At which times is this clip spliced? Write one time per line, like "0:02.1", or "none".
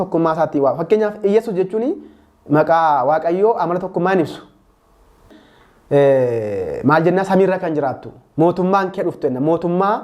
0:05.4

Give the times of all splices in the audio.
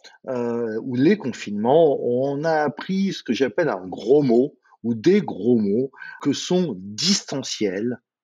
0:06.2

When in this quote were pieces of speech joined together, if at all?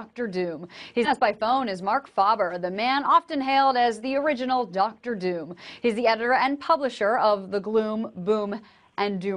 0:01.0

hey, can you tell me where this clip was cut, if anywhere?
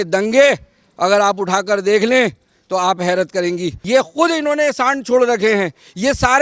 0:03.7

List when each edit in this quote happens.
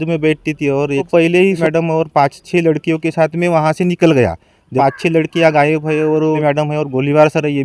0:01.1
0:04.7

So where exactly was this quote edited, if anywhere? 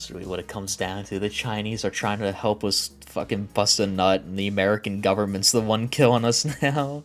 none

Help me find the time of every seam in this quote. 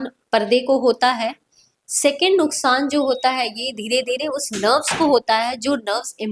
none

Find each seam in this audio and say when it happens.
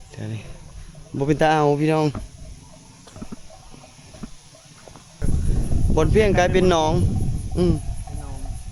0:05.2

